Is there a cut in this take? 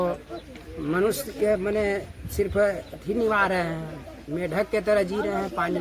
no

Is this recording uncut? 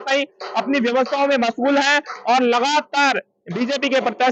yes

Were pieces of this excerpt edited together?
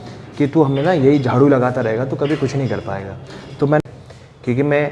yes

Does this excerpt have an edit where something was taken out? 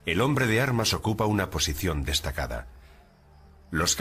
yes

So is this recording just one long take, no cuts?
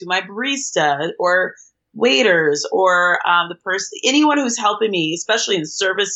yes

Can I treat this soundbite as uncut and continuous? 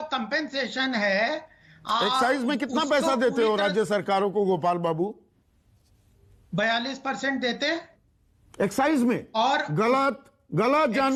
yes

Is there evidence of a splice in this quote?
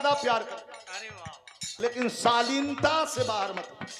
yes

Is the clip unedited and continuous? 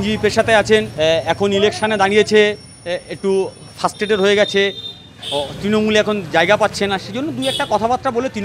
no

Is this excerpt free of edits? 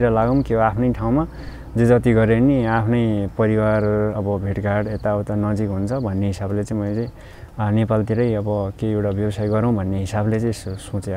yes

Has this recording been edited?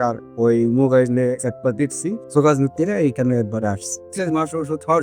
yes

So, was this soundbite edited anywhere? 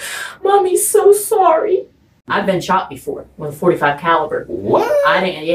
yes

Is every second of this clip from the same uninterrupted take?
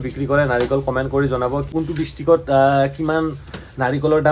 no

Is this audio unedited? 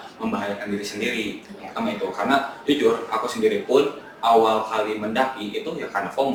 yes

